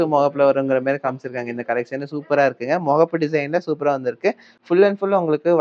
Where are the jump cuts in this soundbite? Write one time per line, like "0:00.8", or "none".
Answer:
none